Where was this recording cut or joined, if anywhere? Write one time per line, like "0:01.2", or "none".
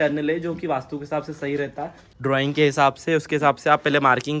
0:02.1